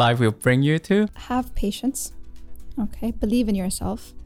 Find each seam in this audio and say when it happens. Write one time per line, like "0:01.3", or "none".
0:01.2